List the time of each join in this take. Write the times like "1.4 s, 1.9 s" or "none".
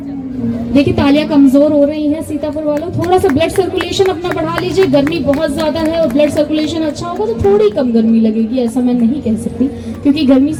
none